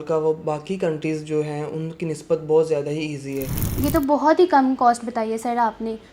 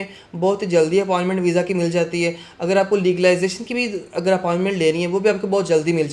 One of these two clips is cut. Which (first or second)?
first